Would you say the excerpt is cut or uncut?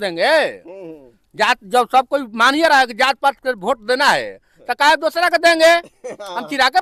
uncut